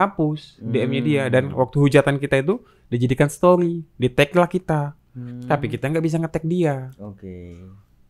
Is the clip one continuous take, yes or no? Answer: yes